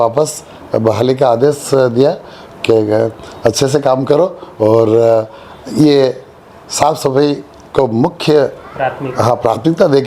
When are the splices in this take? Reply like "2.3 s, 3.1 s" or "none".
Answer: none